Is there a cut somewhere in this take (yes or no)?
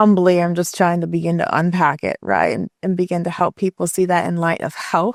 no